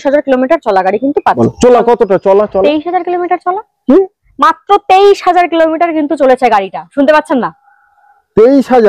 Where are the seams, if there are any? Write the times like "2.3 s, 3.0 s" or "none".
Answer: 1.4 s